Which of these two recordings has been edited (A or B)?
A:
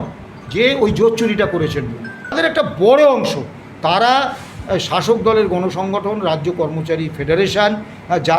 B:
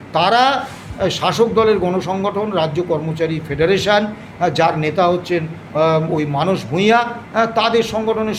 A